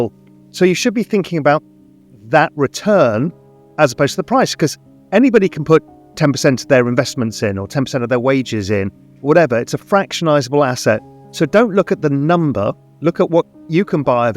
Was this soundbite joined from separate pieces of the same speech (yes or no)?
yes